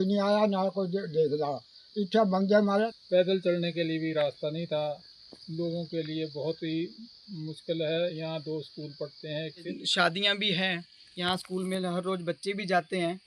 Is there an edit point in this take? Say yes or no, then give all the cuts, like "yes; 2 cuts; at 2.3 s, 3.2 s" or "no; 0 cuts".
yes; 2 cuts; at 2.9 s, 9.7 s